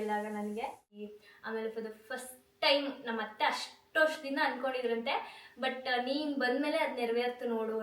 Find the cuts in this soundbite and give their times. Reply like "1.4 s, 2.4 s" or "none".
1.1 s